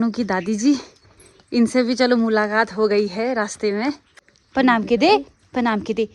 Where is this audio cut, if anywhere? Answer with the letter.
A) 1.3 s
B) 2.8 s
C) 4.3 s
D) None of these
C